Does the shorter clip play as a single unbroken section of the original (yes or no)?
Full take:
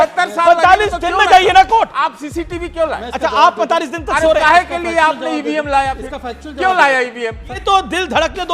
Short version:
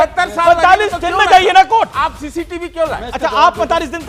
yes